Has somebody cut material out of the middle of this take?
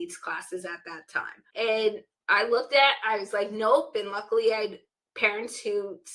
yes; 2 cuts; at 1.4 s, 2.1 s

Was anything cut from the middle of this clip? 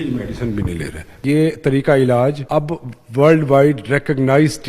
yes; 2 cuts; at 1.2 s, 2.4 s

